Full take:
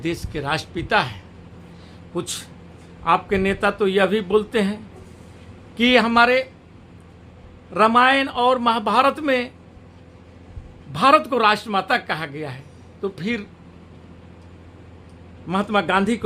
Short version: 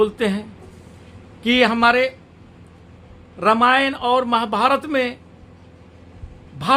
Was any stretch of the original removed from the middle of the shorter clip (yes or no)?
no